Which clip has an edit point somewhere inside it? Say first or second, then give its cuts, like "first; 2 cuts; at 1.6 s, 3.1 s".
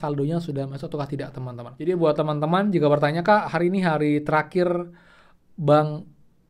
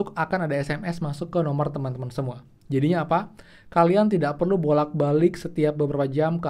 first; 1 cut; at 1.7 s